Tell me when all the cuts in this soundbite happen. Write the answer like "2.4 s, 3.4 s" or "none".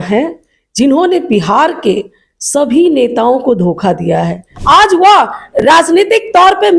4.5 s